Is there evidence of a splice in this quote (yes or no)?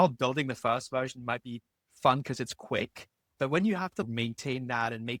no